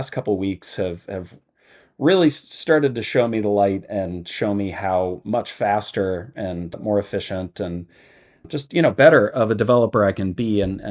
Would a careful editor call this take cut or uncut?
uncut